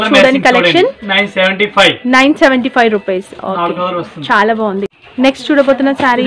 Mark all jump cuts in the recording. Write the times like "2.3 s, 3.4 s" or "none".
none

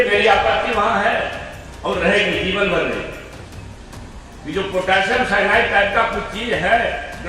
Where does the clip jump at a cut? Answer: none

